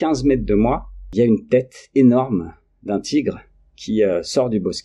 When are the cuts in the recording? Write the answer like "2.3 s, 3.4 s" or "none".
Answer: 1.1 s